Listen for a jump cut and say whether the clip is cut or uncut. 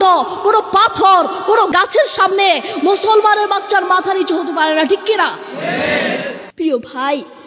cut